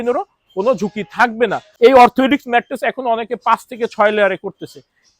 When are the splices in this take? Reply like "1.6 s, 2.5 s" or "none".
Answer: 1.7 s